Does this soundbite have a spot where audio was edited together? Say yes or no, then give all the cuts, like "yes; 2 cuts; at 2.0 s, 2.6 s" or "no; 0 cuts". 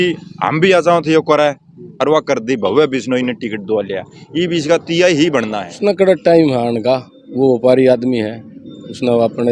yes; 1 cut; at 5.6 s